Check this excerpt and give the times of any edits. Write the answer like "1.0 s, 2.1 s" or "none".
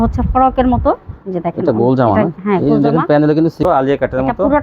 3.6 s